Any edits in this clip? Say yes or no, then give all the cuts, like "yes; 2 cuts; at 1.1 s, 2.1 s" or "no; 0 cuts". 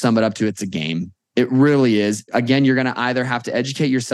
yes; 1 cut; at 2.3 s